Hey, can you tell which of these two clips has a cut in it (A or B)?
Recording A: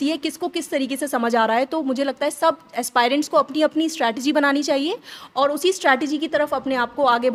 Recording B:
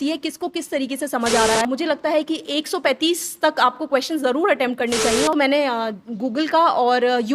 B